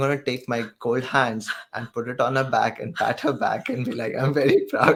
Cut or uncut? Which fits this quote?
uncut